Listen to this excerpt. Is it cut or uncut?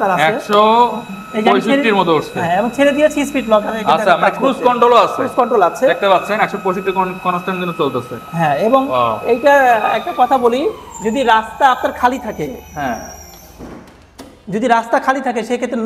uncut